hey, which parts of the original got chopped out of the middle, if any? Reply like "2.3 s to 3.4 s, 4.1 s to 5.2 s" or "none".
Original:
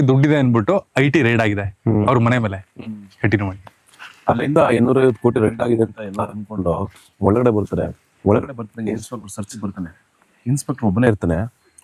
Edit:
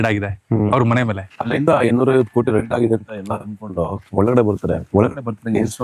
2.8 s to 4.4 s, 6.9 s to 7.1 s, 7.9 s to 8.2 s